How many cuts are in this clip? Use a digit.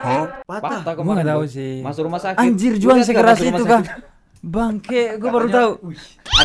0